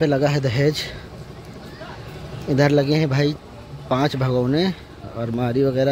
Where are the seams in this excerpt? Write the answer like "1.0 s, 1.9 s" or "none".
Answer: none